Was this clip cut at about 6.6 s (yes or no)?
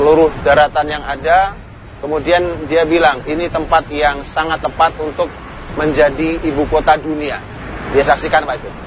no